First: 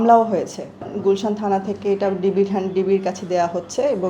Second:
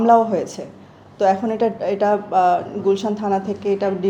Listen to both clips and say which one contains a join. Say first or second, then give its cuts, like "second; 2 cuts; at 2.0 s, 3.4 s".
first; 1 cut; at 0.9 s